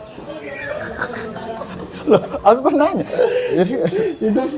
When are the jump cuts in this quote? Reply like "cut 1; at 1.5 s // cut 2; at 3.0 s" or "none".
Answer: cut 1; at 1.7 s